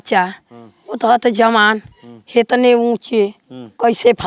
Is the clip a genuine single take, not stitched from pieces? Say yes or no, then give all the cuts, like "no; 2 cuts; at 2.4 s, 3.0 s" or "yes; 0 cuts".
yes; 0 cuts